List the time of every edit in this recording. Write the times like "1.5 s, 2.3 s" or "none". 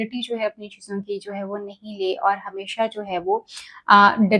none